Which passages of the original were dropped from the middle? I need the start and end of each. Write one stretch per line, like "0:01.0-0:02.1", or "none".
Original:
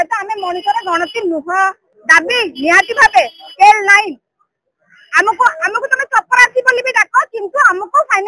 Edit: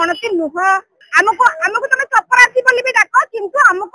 0:01.9-0:05.0